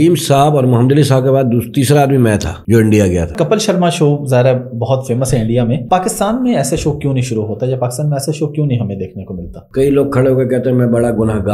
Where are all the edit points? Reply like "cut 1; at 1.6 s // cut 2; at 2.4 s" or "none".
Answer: cut 1; at 2.5 s // cut 2; at 3.3 s // cut 3; at 5.8 s // cut 4; at 9.5 s